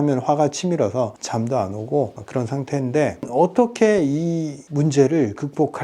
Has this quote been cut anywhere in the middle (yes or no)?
yes